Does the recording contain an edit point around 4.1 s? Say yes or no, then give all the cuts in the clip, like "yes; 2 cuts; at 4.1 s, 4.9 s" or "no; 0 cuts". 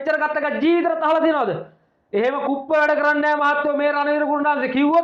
no; 0 cuts